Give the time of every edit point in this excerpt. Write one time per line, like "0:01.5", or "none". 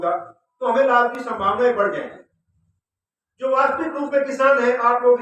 none